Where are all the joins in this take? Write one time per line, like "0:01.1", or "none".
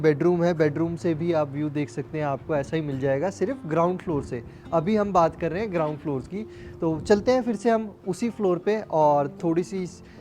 none